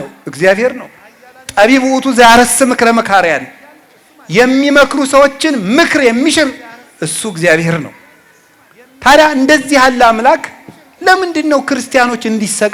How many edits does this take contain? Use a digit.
0